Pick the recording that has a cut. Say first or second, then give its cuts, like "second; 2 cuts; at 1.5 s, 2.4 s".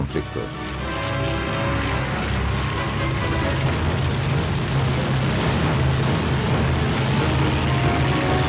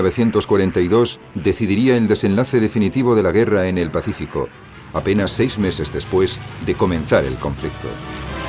second; 1 cut; at 3.5 s